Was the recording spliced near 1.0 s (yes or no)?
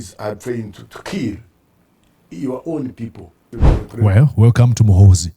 no